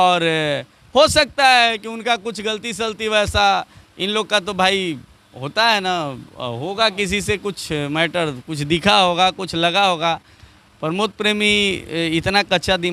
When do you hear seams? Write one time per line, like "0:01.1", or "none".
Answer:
none